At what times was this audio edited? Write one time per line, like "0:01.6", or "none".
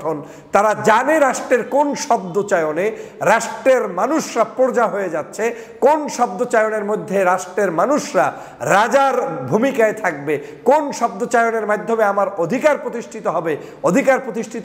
none